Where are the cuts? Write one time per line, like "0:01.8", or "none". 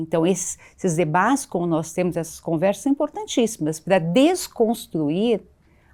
none